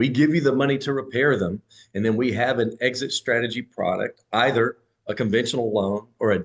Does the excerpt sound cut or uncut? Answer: uncut